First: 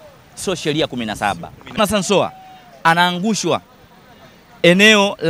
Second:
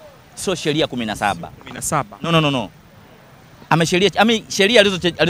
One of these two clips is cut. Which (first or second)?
first